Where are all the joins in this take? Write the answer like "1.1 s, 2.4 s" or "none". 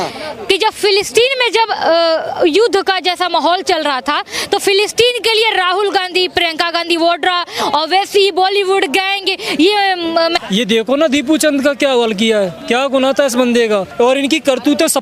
10.4 s, 12.6 s, 13.9 s